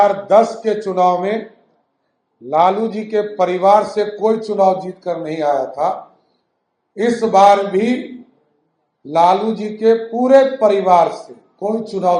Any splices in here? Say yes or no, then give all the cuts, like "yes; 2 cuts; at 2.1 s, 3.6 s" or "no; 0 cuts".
no; 0 cuts